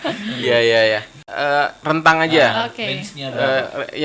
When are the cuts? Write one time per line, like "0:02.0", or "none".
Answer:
0:01.2